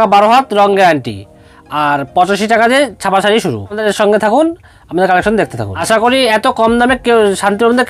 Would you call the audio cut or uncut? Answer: cut